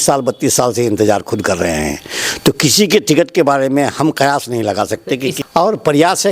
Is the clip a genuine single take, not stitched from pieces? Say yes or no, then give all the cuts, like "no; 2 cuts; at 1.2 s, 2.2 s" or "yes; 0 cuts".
no; 1 cut; at 5.4 s